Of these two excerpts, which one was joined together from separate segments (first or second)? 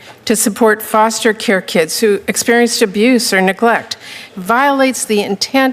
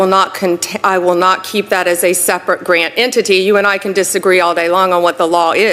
first